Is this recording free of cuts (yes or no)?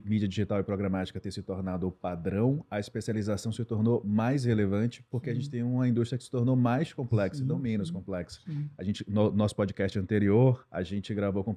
yes